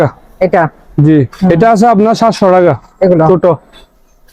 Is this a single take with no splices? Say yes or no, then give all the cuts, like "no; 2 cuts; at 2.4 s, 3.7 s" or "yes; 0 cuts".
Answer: no; 1 cut; at 1.5 s